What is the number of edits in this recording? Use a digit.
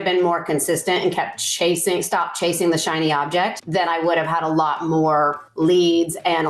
1